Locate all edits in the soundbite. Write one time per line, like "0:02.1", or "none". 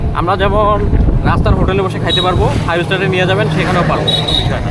none